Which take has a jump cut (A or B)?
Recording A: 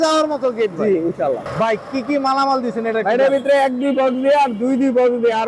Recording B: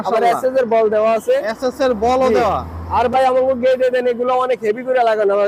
A